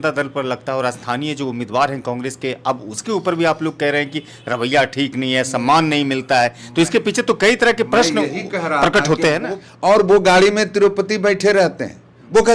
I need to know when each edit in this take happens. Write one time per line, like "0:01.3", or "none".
0:09.5